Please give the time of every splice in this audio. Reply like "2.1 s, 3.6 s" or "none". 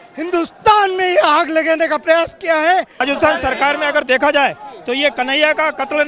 3.0 s